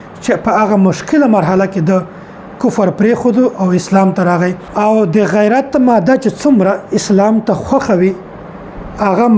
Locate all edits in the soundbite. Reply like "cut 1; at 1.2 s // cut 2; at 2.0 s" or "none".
cut 1; at 4.6 s